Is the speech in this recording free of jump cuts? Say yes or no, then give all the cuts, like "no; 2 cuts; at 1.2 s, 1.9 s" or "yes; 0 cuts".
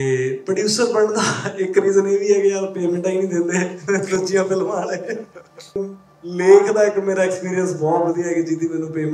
no; 1 cut; at 5.8 s